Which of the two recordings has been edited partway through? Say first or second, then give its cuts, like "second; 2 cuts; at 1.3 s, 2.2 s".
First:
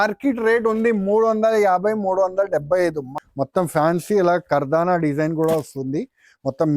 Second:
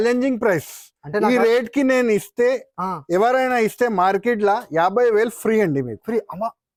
first; 1 cut; at 3.1 s